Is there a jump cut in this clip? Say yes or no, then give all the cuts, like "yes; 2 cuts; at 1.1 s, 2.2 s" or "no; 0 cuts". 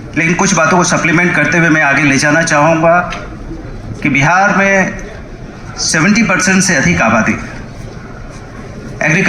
no; 0 cuts